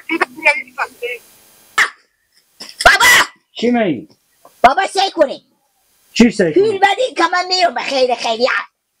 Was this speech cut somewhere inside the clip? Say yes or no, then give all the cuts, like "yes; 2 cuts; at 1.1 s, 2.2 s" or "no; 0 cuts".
yes; 1 cut; at 1.7 s